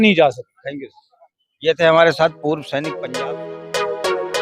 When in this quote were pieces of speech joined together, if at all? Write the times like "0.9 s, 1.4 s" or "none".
2.9 s